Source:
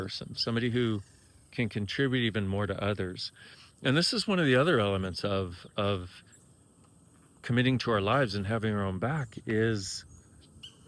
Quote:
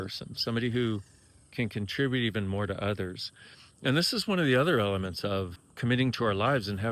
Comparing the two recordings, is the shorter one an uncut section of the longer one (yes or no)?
no